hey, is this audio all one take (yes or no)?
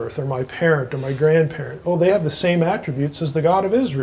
yes